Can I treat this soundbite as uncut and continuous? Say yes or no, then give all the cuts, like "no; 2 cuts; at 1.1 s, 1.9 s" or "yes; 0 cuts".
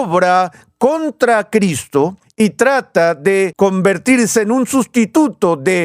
no; 2 cuts; at 2.2 s, 3.5 s